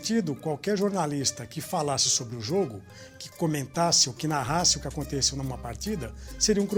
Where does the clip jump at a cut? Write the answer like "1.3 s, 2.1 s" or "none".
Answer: none